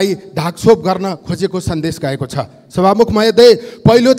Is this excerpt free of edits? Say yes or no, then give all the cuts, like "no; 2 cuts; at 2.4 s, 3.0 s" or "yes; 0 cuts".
yes; 0 cuts